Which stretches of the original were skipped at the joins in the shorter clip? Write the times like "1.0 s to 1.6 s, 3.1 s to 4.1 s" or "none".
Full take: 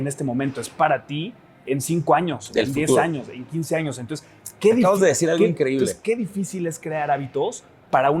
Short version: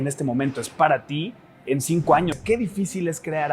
2.4 s to 6.0 s